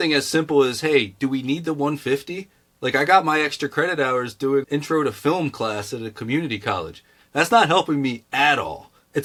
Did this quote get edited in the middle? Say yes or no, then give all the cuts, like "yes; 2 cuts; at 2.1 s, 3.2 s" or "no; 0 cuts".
no; 0 cuts